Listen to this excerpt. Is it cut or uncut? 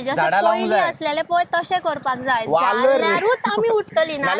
uncut